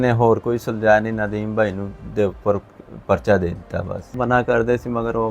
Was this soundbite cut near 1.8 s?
no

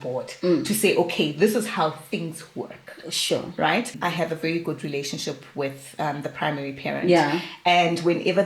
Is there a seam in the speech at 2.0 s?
no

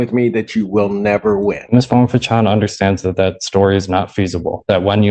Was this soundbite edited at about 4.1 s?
no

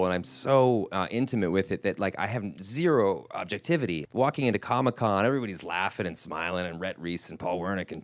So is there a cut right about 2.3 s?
no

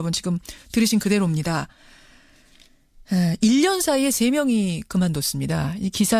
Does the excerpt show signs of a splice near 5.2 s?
no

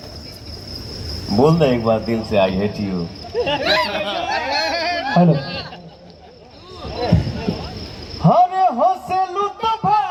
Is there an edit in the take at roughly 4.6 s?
no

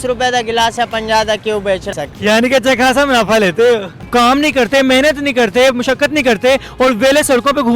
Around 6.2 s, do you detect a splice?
no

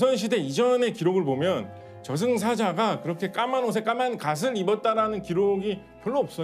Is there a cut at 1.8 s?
no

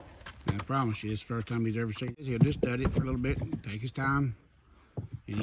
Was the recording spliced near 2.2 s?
yes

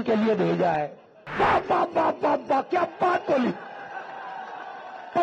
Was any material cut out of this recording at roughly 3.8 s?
no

